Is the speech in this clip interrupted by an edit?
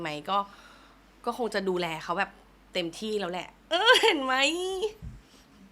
no; 0 cuts

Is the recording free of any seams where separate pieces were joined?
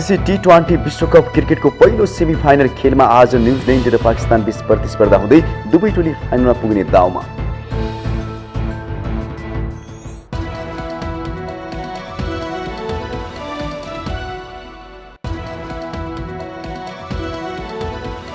no; 1 cut; at 15.1 s

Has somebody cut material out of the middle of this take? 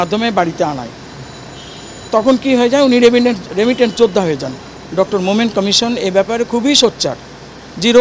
yes; 1 cut; at 4.7 s

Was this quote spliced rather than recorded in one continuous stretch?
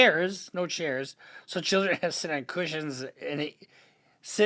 no; 0 cuts

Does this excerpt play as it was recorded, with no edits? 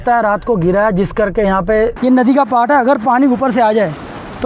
no; 1 cut; at 2.0 s

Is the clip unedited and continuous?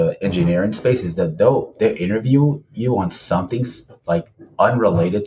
yes; 0 cuts

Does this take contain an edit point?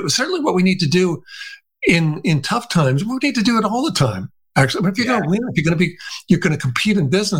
no; 0 cuts

